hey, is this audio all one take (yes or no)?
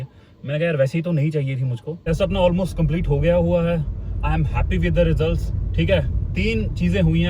no